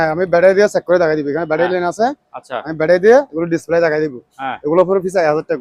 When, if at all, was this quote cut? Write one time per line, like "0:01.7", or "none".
none